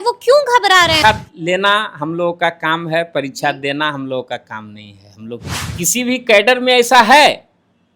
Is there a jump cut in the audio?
yes; 2 cuts; at 1.0 s, 5.5 s

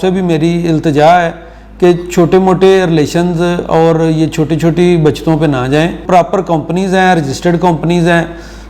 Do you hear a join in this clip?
yes; 1 cut; at 6.0 s

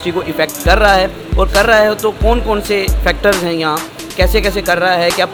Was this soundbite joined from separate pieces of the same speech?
no; 0 cuts

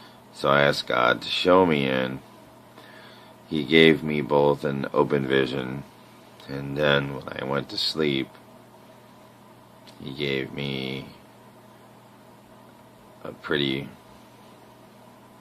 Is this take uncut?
no; 1 cut; at 13.5 s

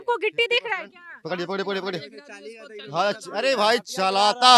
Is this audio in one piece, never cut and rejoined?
yes; 0 cuts

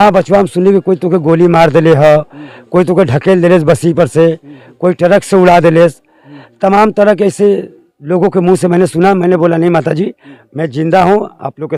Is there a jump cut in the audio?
no; 0 cuts

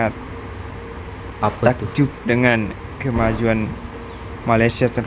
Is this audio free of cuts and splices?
yes; 0 cuts

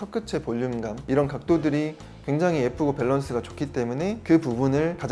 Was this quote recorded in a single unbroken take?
yes; 0 cuts

